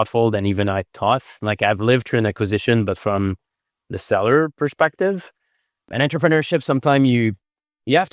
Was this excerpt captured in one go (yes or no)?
no